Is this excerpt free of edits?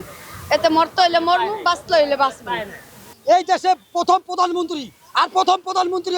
no; 1 cut; at 3.0 s

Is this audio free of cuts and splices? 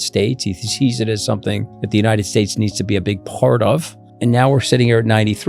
no; 2 cuts; at 1.7 s, 4.1 s

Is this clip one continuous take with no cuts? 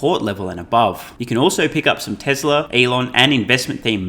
no; 2 cuts; at 1.1 s, 2.7 s

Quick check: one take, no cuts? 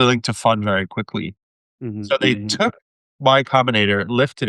yes; 0 cuts

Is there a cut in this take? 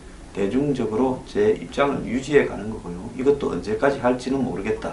no; 0 cuts

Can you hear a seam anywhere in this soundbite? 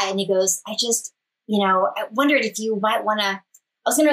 no; 0 cuts

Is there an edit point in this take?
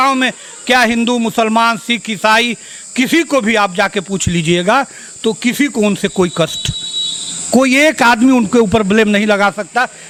no; 0 cuts

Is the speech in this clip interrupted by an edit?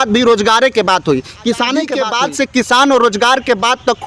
yes; 1 cut; at 2.0 s

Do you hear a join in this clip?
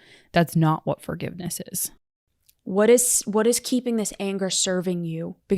yes; 1 cut; at 2.2 s

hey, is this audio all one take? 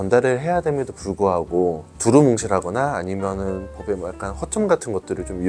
yes; 0 cuts

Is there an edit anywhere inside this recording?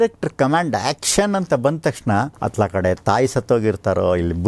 yes; 1 cut; at 2.4 s

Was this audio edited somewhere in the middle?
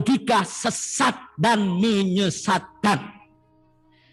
no; 0 cuts

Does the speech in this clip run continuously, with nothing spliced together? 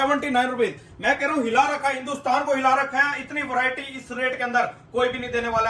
yes; 0 cuts

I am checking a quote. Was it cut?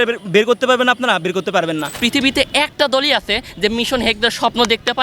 yes; 1 cut; at 2.0 s

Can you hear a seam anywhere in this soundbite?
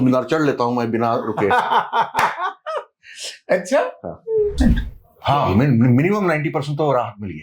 yes; 1 cut; at 4.6 s

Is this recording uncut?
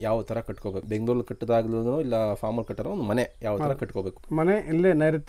no; 2 cuts; at 0.8 s, 4.2 s

